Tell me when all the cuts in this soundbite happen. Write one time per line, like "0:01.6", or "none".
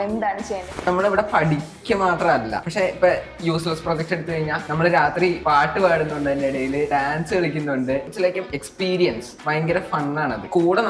0:00.8
0:06.9
0:08.1